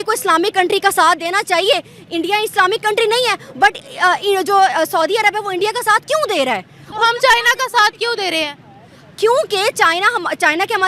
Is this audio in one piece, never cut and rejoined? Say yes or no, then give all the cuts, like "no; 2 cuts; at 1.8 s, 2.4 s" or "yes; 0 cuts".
yes; 0 cuts